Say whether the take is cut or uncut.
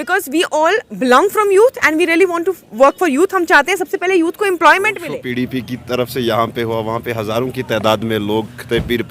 cut